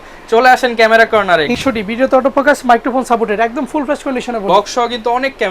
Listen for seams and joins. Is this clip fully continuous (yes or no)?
no